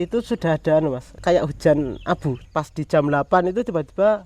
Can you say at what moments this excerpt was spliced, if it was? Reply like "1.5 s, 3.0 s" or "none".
1.1 s, 2.3 s